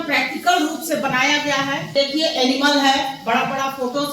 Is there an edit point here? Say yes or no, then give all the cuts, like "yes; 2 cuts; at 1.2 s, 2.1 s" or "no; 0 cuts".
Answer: yes; 1 cut; at 1.9 s